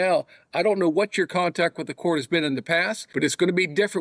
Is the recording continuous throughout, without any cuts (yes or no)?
no